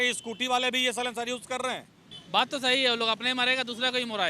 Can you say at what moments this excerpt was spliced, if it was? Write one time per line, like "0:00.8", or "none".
0:02.1